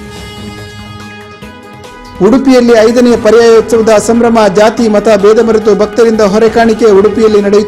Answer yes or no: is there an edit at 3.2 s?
no